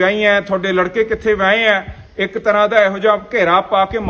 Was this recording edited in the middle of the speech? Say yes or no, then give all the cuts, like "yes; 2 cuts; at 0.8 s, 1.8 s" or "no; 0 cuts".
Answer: no; 0 cuts